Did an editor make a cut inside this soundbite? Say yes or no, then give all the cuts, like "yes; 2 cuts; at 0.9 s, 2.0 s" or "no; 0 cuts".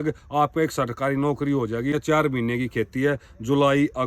yes; 1 cut; at 2.0 s